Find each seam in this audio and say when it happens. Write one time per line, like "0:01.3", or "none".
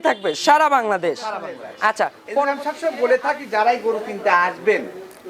0:02.5